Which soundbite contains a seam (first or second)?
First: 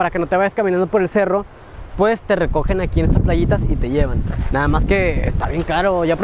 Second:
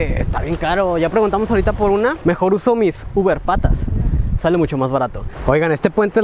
second